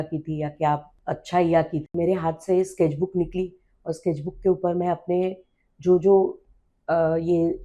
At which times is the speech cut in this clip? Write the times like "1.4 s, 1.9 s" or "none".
0.9 s, 1.9 s